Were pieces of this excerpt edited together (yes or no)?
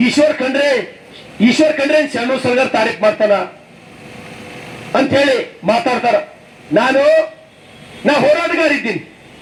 no